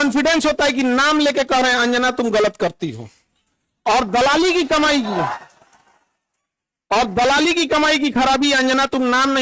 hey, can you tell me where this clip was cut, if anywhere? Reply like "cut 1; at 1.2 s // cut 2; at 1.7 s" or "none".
none